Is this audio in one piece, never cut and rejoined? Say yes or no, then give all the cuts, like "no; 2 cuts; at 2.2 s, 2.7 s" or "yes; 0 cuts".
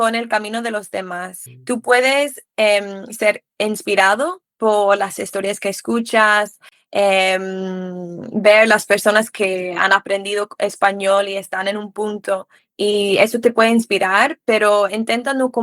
yes; 0 cuts